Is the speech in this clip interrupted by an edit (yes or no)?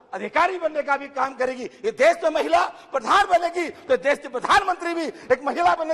no